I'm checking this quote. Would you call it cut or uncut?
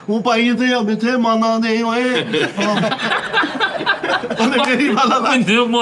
uncut